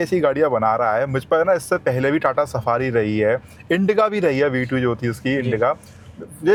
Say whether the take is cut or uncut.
uncut